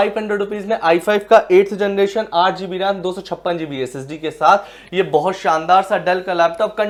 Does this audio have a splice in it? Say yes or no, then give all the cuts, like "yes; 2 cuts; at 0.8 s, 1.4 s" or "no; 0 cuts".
no; 0 cuts